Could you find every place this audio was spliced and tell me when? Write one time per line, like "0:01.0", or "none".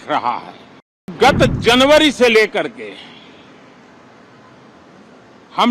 0:01.1